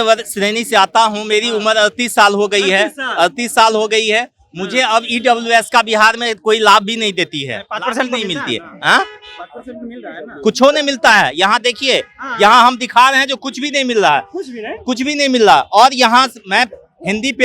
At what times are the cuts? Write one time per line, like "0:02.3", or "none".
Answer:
none